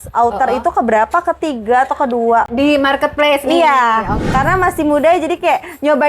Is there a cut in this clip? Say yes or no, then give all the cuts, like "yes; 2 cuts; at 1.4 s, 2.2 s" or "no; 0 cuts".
yes; 1 cut; at 4.2 s